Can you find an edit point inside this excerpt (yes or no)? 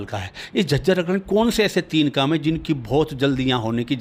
no